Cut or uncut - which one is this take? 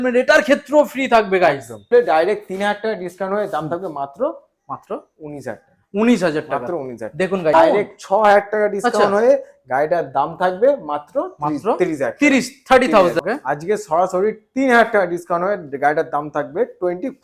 cut